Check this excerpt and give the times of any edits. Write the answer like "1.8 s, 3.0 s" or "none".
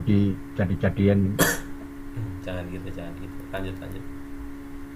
none